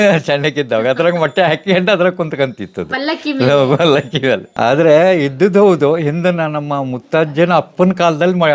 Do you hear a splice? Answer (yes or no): yes